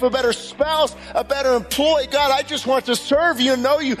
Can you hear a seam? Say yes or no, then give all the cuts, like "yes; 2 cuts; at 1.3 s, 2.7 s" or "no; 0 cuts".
no; 0 cuts